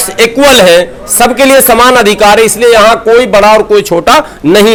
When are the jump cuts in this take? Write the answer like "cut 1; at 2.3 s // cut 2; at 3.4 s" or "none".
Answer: none